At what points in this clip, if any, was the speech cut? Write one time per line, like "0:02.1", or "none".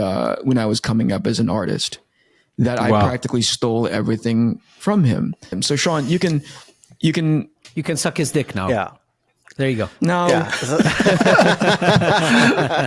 0:05.6